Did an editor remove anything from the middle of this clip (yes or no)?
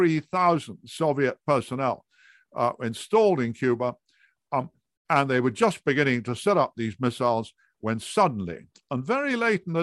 no